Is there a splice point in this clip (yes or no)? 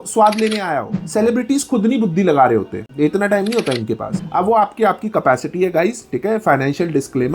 yes